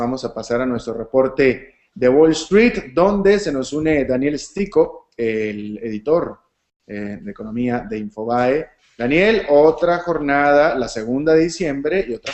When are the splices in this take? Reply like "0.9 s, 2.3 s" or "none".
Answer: 4.0 s